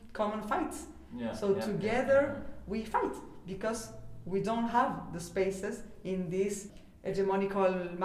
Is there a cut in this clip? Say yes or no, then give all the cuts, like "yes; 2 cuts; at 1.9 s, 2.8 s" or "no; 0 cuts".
yes; 1 cut; at 6.8 s